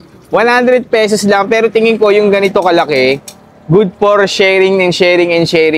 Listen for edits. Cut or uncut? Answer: uncut